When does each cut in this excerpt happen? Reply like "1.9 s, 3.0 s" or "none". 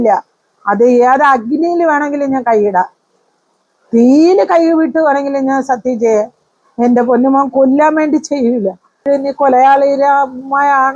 9.1 s